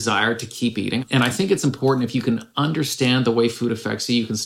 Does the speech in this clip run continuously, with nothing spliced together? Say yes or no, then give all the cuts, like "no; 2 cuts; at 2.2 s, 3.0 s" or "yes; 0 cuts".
no; 1 cut; at 1.0 s